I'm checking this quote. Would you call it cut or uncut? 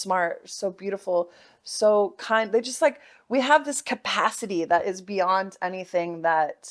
uncut